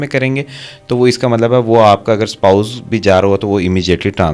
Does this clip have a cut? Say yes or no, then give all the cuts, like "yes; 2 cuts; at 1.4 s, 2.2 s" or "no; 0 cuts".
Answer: no; 0 cuts